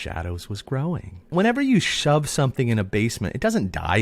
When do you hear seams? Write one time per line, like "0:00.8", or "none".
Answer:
0:01.3